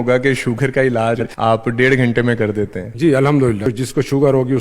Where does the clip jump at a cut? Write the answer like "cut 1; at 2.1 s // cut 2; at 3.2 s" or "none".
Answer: cut 1; at 1.3 s // cut 2; at 2.8 s // cut 3; at 3.7 s